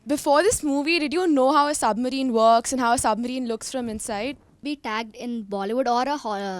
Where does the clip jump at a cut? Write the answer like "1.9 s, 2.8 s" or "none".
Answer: 4.6 s